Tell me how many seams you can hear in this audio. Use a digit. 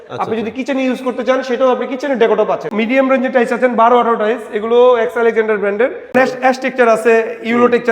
2